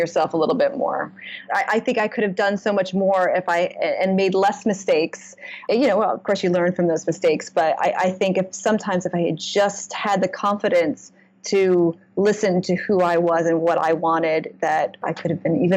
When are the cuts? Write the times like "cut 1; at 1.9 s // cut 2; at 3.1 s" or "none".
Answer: cut 1; at 1.4 s // cut 2; at 5.6 s // cut 3; at 15.0 s

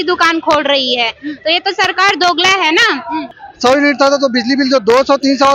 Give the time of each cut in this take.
cut 1; at 3.4 s

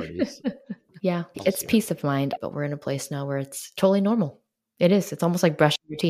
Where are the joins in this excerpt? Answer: cut 1; at 1.3 s // cut 2; at 2.4 s

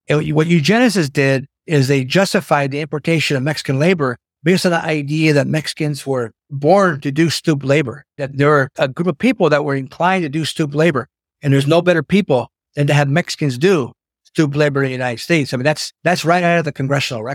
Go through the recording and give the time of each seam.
cut 1; at 1.5 s // cut 2; at 4.3 s // cut 3; at 6.4 s // cut 4; at 8.3 s // cut 5; at 15.9 s

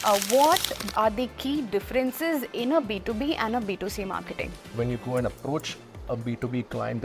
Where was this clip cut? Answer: cut 1; at 0.9 s // cut 2; at 4.7 s

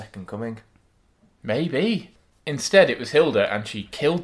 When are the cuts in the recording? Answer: cut 1; at 2.1 s

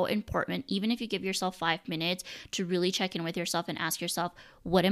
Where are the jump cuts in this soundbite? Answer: none

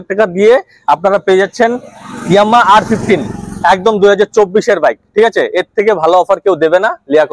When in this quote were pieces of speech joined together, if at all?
none

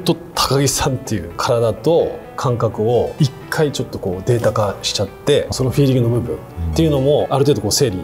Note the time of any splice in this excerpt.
cut 1; at 1.3 s // cut 2; at 3.1 s // cut 3; at 5.5 s // cut 4; at 7.3 s

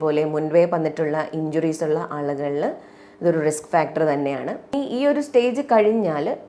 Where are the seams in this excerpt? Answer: cut 1; at 4.7 s

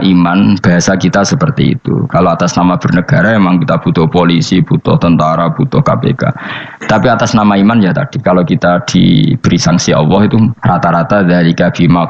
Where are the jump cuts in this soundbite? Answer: cut 1; at 10.6 s

